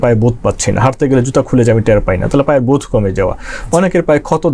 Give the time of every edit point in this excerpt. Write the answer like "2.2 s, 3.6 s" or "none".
none